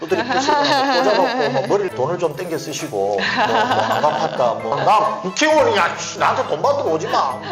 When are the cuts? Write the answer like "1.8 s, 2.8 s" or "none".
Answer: 1.9 s, 4.8 s

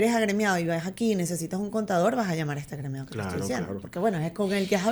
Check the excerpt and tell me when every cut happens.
none

